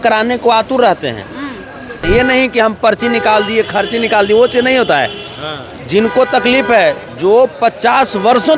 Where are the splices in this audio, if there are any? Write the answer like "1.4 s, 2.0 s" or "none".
2.0 s